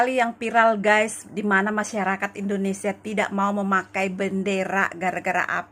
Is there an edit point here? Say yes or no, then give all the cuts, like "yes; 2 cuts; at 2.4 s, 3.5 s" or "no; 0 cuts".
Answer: no; 0 cuts